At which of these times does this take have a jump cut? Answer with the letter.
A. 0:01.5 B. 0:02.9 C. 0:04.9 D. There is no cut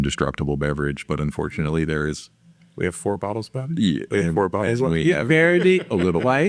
D